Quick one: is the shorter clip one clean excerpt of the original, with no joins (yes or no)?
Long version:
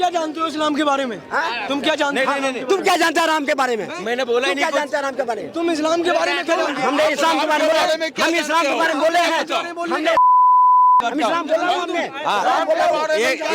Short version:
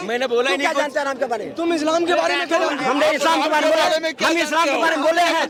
yes